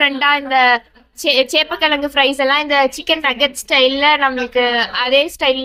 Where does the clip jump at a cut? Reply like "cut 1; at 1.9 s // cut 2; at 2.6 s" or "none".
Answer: none